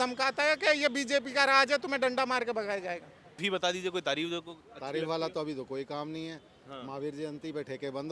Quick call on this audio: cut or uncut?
cut